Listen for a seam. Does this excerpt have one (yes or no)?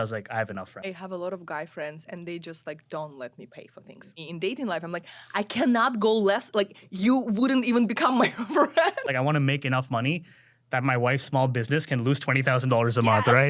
yes